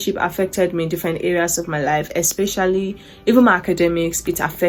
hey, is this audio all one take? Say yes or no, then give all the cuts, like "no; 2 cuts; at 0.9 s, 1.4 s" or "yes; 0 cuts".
yes; 0 cuts